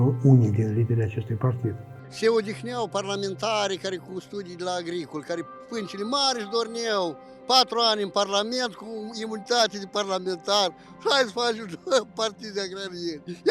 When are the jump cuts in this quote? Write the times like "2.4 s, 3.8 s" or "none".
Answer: 2.0 s